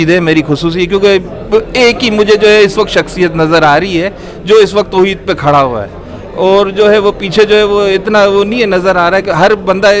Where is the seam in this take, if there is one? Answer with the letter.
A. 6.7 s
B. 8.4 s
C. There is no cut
C